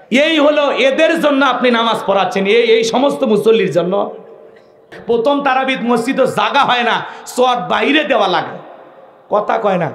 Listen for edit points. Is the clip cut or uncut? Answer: cut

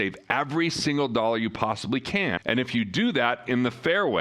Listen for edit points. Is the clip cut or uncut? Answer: cut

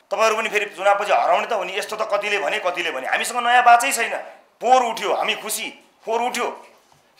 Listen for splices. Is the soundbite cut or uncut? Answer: cut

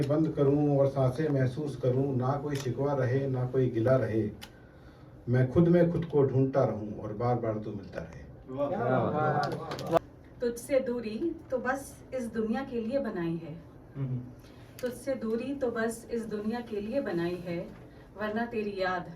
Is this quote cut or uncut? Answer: uncut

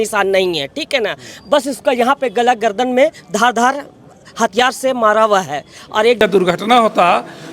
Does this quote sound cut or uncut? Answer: cut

